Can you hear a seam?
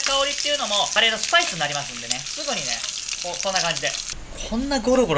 yes; 3 cuts; at 0.9 s, 2.2 s, 4.0 s

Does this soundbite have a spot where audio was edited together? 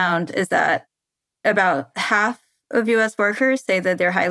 no; 0 cuts

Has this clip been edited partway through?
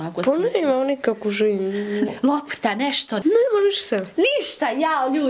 yes; 2 cuts; at 2.1 s, 3.2 s

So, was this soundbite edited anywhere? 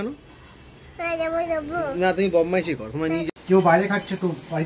yes; 1 cut; at 3.3 s

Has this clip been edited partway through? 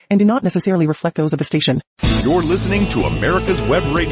yes; 1 cut; at 1.9 s

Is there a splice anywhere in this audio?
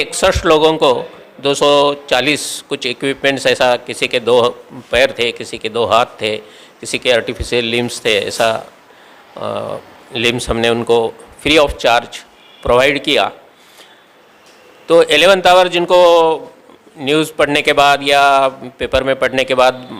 no; 0 cuts

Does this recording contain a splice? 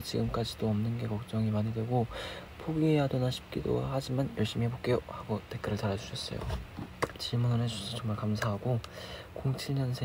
yes; 1 cut; at 7.2 s

